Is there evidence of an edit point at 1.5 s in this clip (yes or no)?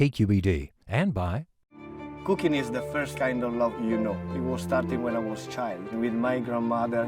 no